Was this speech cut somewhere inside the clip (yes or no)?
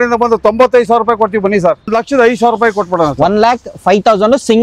yes